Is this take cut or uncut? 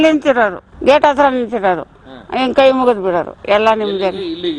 uncut